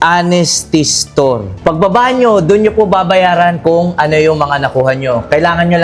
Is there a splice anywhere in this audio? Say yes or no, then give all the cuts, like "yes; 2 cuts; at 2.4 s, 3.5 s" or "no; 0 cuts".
yes; 1 cut; at 1.5 s